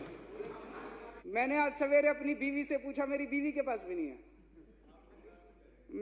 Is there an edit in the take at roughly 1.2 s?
yes; 1 cut; at 1.2 s

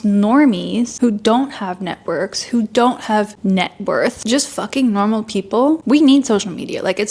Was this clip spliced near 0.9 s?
yes; 4 cuts; at 0.9 s, 3.3 s, 4.2 s, 5.8 s

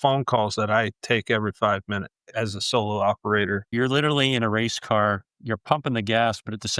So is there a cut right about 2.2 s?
yes; 2 cuts; at 2.2 s, 3.7 s

